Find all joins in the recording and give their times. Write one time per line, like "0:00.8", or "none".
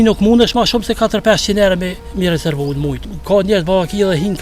0:02.0
0:03.1